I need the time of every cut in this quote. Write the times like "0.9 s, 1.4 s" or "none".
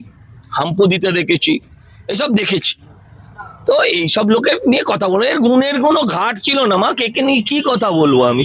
none